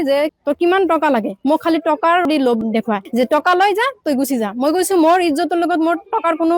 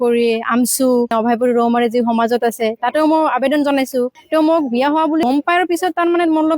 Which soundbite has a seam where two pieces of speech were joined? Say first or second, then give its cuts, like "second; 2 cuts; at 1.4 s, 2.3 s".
second; 1 cut; at 4.2 s